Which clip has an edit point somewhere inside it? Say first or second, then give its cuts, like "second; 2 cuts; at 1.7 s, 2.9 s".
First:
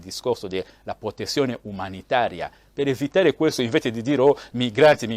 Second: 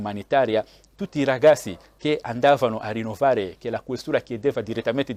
first; 1 cut; at 2.6 s